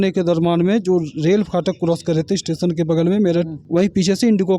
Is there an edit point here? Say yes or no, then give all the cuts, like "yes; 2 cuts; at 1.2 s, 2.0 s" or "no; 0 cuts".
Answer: yes; 1 cut; at 3.6 s